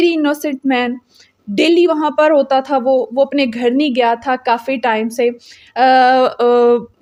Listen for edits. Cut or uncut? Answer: uncut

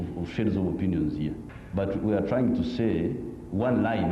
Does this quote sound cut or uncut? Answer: cut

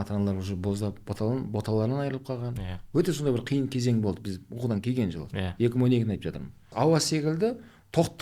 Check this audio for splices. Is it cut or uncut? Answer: cut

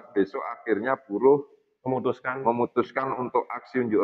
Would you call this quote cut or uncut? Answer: uncut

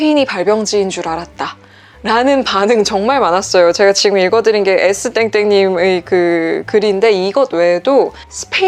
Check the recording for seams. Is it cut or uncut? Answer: uncut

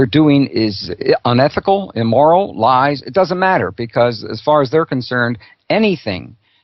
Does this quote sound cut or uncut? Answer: uncut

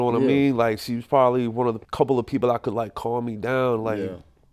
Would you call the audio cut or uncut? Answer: uncut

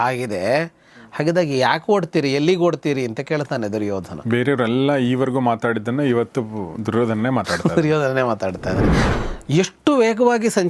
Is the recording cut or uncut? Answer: cut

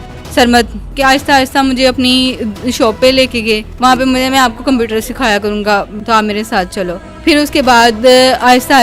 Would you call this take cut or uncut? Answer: cut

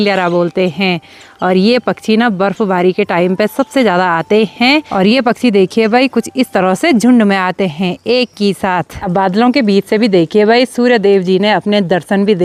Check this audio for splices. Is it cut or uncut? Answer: uncut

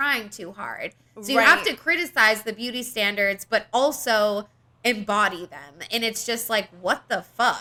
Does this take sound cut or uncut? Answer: uncut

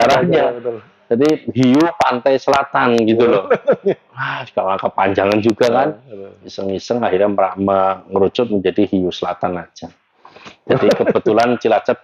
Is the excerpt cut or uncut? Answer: uncut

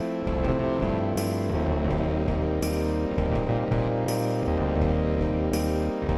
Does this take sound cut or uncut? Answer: uncut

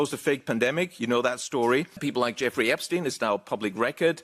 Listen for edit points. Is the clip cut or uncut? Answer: cut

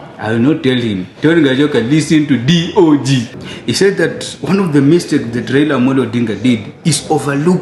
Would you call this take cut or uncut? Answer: cut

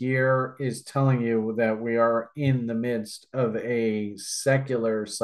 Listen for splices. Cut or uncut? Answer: uncut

